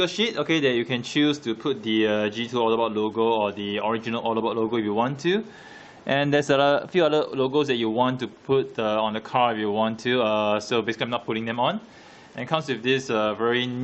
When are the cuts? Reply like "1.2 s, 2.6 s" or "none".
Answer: 3.7 s